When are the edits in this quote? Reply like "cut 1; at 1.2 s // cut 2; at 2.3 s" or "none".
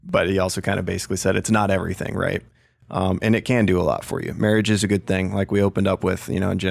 none